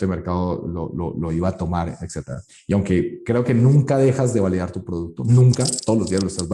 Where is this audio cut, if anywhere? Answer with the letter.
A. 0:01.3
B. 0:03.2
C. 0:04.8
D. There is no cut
D